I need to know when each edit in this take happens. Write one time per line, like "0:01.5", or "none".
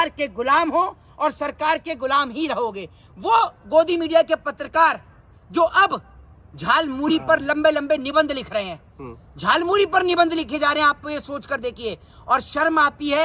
none